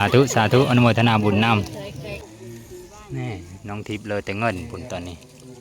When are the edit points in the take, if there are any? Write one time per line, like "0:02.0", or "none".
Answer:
0:02.2